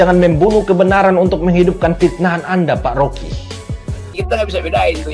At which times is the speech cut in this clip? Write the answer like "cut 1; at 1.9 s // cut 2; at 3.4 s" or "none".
cut 1; at 4.1 s